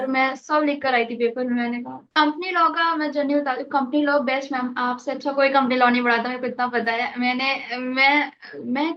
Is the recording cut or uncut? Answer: cut